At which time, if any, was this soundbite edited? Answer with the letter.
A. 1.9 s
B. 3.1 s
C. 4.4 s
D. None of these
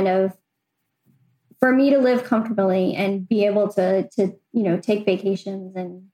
D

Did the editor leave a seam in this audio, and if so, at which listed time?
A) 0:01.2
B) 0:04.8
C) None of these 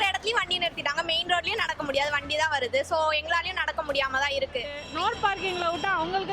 B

